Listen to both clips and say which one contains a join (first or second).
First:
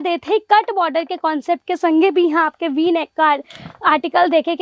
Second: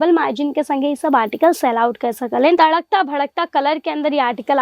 second